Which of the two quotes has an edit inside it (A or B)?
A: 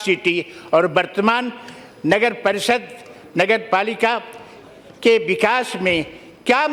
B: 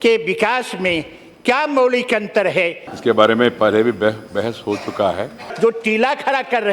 B